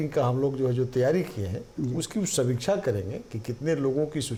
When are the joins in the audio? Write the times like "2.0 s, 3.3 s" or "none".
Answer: none